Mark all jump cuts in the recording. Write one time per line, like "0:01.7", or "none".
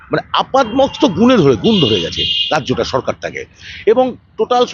none